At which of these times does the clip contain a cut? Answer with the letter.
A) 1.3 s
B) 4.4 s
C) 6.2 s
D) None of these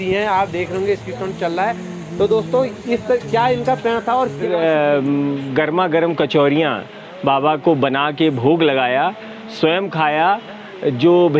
B